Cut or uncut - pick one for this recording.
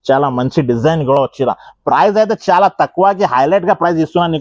uncut